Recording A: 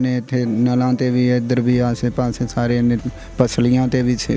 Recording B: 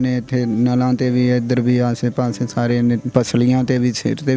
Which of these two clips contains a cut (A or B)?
B